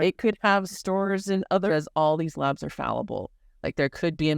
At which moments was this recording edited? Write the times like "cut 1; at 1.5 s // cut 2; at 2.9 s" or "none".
cut 1; at 1.7 s